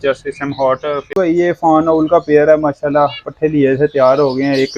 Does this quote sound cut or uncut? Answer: cut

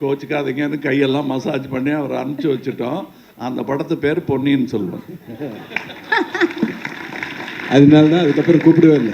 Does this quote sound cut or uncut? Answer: uncut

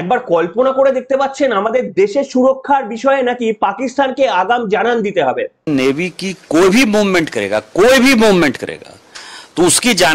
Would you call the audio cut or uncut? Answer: cut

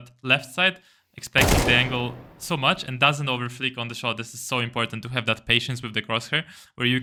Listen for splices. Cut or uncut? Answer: uncut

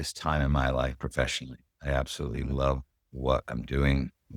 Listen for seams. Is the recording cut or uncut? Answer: uncut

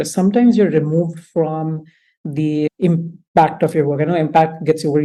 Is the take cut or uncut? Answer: uncut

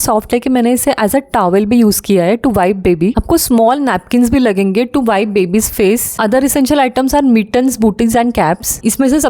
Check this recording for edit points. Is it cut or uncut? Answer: uncut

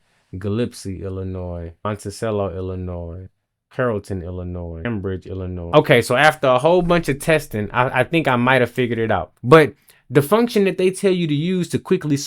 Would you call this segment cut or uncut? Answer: cut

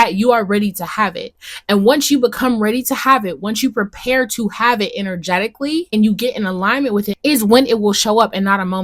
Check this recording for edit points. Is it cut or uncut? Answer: cut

